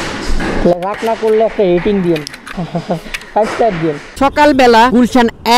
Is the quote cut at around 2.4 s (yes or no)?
no